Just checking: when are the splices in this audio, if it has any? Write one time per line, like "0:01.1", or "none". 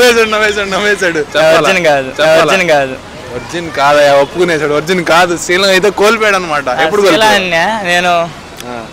0:01.2